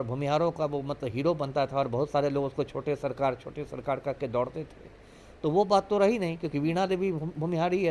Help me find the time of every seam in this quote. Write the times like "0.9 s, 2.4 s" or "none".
none